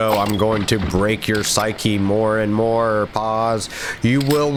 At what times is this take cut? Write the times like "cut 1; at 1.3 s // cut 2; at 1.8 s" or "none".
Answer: none